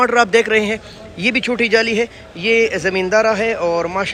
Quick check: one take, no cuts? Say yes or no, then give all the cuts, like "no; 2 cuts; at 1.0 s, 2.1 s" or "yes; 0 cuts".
yes; 0 cuts